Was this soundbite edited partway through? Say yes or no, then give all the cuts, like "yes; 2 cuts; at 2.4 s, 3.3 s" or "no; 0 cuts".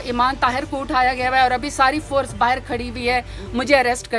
no; 0 cuts